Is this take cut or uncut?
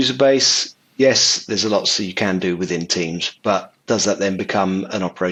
uncut